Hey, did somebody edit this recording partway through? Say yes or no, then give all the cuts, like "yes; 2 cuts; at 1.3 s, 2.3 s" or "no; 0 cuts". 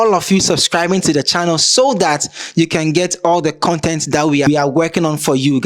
yes; 1 cut; at 4.5 s